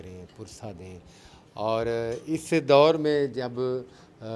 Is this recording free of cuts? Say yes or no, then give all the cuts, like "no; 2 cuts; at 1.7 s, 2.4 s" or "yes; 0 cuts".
yes; 0 cuts